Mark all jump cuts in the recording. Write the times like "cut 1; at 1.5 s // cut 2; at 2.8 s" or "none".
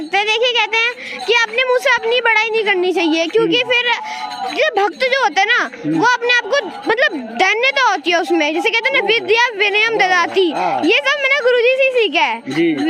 none